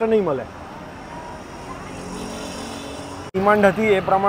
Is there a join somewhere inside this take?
yes; 1 cut; at 3.3 s

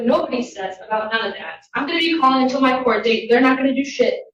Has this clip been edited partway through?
no; 0 cuts

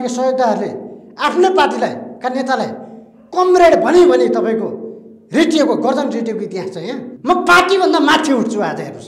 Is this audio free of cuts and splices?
no; 1 cut; at 7.1 s

